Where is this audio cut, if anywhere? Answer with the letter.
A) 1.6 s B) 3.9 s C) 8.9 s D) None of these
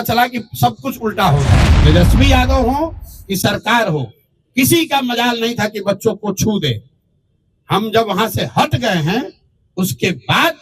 A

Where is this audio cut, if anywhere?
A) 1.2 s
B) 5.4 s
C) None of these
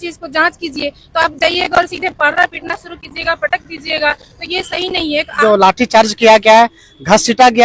B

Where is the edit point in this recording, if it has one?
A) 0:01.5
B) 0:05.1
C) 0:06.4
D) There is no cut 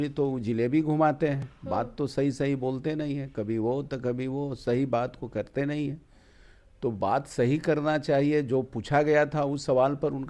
D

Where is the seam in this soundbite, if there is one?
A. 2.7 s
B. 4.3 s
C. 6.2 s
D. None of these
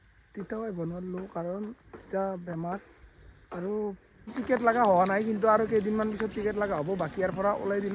B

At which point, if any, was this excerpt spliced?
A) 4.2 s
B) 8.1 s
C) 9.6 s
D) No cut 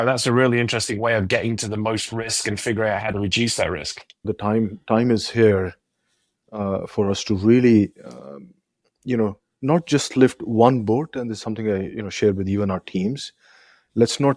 A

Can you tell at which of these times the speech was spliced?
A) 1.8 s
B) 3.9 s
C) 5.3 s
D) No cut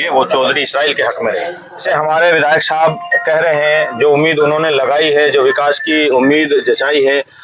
A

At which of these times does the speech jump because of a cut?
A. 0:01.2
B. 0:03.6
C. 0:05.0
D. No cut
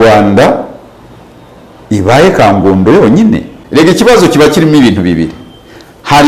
B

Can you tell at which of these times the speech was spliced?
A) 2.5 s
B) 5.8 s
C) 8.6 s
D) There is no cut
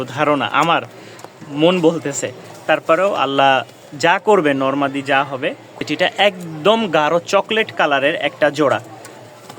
B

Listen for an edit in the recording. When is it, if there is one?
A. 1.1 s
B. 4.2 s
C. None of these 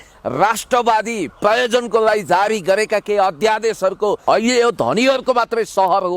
B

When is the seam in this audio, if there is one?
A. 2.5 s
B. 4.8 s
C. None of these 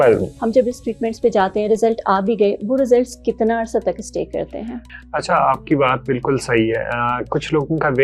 B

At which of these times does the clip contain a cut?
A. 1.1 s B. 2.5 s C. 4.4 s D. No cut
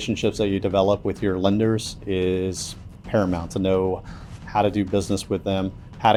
D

